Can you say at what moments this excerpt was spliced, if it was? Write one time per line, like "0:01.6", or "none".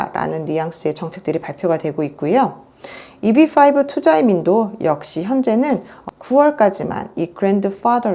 none